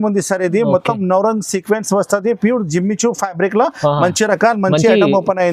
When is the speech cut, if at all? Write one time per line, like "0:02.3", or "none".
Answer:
none